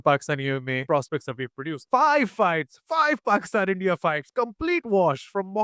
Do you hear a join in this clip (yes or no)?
yes